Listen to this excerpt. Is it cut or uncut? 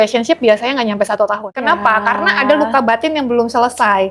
cut